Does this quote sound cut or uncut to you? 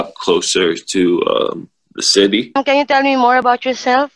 cut